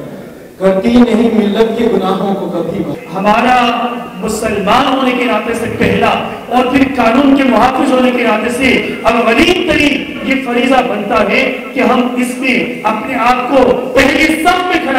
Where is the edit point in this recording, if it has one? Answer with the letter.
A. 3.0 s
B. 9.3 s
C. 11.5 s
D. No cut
A